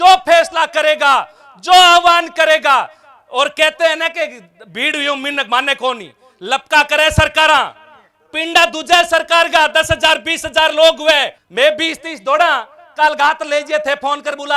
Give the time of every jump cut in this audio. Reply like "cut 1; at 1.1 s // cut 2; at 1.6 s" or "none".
cut 1; at 11.4 s